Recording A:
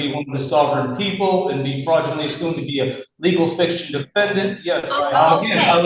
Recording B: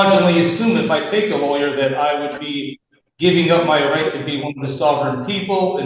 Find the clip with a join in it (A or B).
A